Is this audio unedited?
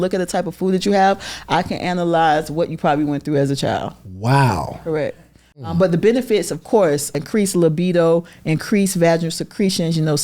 no; 2 cuts; at 5.6 s, 7.2 s

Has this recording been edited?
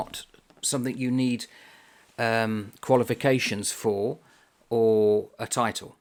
no; 0 cuts

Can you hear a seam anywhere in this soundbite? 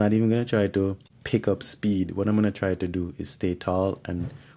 yes; 1 cut; at 1.1 s

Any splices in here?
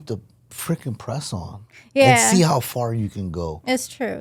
no; 0 cuts

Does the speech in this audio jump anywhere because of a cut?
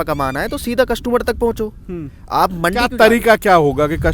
no; 0 cuts

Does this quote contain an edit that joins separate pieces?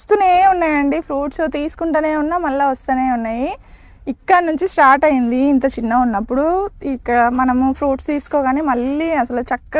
no; 0 cuts

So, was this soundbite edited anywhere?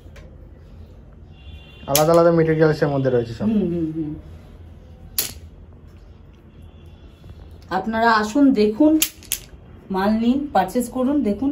no; 0 cuts

